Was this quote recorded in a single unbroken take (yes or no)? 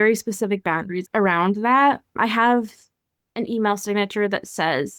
no